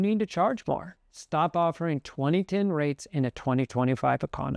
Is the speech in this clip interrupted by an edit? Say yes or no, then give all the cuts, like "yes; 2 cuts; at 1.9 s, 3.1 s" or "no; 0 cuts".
yes; 1 cut; at 1.0 s